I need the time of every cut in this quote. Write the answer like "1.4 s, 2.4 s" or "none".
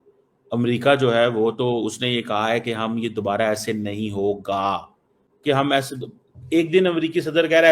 none